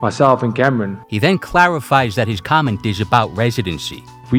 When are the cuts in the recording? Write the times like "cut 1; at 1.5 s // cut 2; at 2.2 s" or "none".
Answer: none